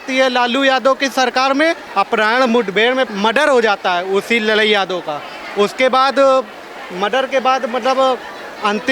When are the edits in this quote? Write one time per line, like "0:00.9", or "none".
0:01.8
0:03.1